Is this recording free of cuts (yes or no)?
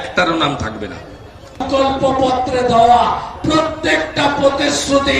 no